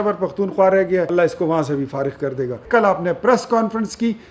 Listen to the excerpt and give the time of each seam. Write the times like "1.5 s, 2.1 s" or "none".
1.1 s, 2.6 s